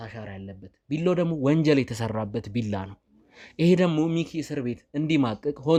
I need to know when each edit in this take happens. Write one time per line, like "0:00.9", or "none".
none